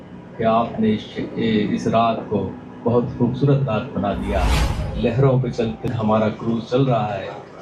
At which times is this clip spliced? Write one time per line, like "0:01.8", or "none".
0:05.8